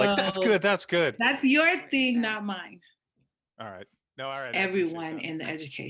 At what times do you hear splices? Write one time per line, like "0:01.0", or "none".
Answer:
0:04.5